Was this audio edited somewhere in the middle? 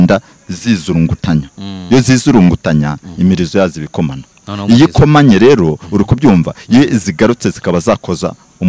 no; 0 cuts

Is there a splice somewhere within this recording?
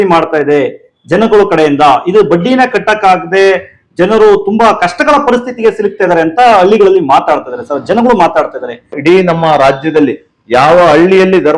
yes; 1 cut; at 8.9 s

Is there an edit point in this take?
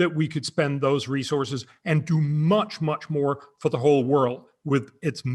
no; 0 cuts

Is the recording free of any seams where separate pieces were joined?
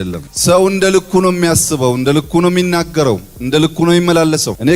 yes; 0 cuts

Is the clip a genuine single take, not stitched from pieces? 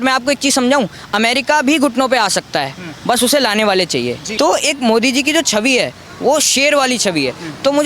no; 1 cut; at 4.2 s

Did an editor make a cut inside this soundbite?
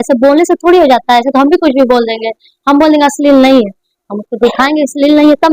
no; 0 cuts

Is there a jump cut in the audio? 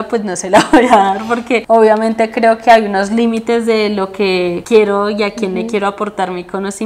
no; 0 cuts

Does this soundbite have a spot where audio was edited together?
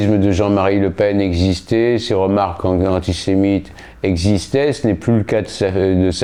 no; 0 cuts

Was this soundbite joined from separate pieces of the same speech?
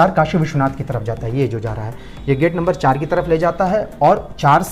no; 0 cuts

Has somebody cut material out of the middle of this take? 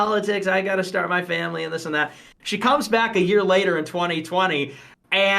yes; 1 cut; at 2.2 s

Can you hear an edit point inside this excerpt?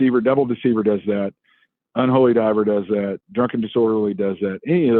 no; 0 cuts

